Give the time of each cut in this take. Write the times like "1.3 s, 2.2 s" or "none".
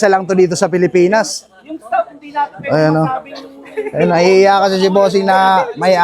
none

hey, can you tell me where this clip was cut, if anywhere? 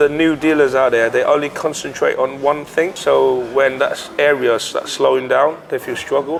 none

